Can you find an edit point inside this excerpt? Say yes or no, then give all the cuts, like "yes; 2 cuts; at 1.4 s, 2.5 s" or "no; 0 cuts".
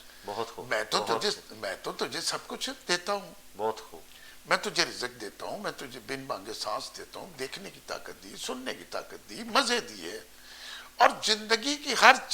no; 0 cuts